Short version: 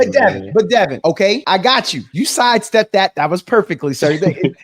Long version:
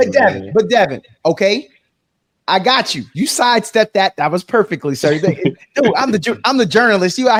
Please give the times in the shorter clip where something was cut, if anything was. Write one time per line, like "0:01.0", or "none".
0:01.1

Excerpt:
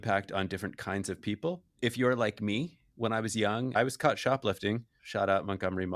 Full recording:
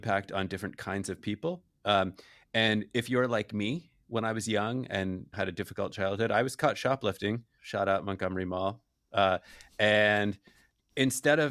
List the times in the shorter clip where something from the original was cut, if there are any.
0:01.8
0:03.7

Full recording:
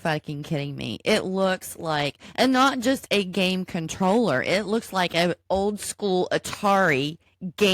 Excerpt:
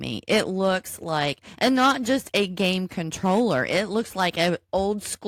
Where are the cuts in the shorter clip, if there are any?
none

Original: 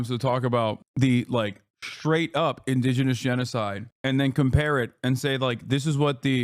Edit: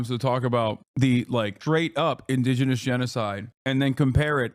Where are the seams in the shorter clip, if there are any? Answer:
0:01.6

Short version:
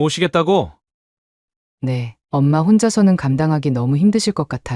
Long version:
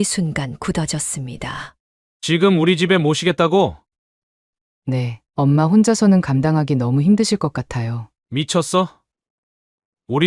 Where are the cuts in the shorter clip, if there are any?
none

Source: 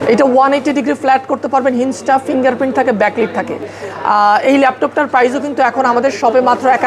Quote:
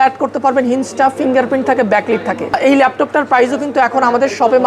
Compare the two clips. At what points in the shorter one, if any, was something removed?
0:02.6

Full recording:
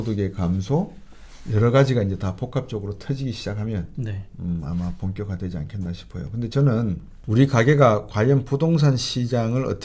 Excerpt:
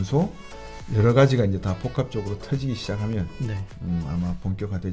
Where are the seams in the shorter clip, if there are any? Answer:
none

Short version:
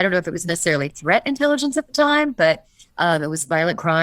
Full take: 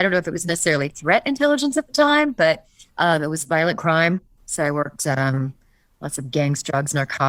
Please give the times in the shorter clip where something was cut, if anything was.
none

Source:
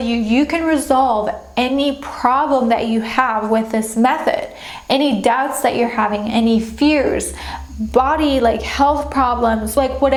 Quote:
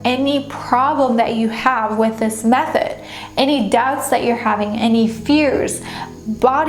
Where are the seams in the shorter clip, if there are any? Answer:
none

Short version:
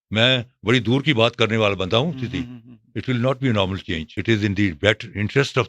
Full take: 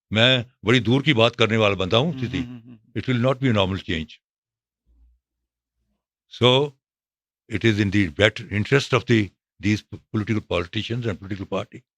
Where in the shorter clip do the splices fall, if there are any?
0:04.1

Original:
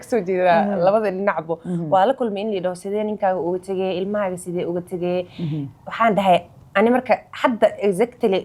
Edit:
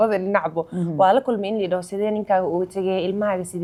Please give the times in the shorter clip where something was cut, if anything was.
none

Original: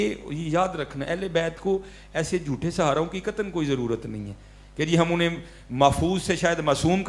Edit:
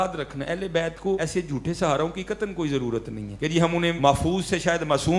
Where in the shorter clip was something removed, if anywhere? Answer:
0:01.2
0:03.2
0:04.0

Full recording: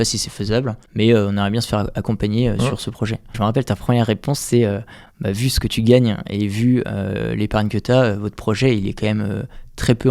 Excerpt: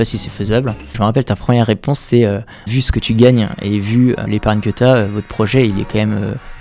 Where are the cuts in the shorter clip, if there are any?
0:00.8
0:02.7
0:04.2

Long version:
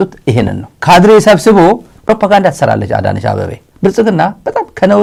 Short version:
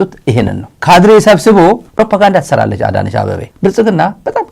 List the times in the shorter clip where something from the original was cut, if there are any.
0:01.9
0:03.4

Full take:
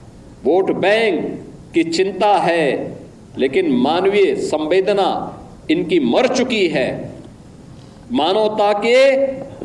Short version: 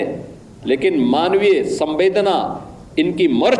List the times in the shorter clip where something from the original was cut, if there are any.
none

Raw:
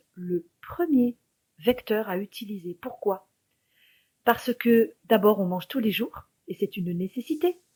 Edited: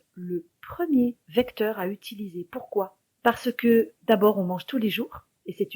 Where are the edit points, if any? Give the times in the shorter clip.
0:01.2
0:03.0

